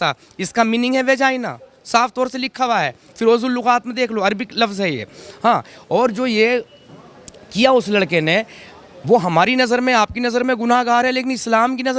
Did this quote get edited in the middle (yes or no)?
no